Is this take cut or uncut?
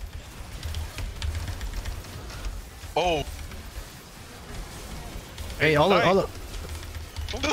uncut